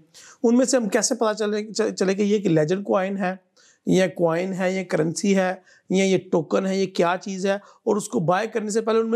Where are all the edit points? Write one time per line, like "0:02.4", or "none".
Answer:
none